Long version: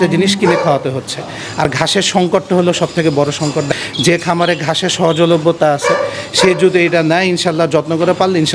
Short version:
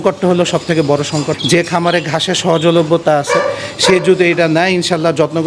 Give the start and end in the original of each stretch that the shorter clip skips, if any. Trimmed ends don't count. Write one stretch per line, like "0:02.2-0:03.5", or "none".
0:03.6-0:03.9